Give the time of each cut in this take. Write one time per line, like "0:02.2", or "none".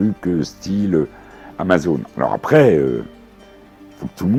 none

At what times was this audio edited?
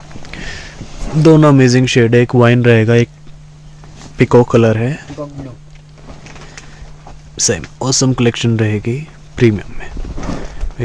none

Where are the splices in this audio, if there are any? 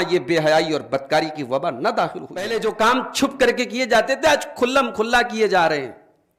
0:02.5

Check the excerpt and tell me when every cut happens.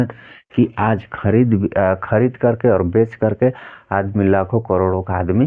none

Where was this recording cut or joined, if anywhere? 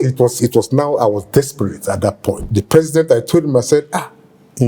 0:02.4

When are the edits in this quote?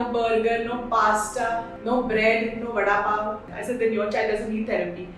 0:01.7
0:03.5

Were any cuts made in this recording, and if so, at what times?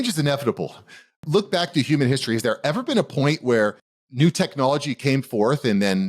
0:01.2

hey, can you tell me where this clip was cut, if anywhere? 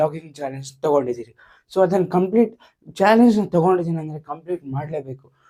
none

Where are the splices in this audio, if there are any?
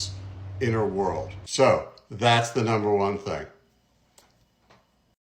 none

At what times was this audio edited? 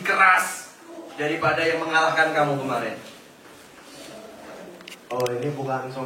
none

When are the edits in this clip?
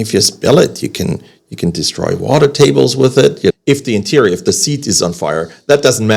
0:03.5

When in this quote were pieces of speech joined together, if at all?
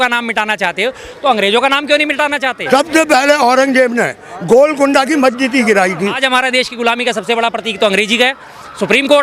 0:02.6
0:06.2

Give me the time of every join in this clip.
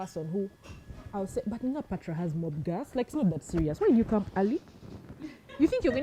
none

